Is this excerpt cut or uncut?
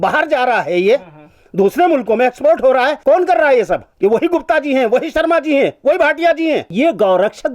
cut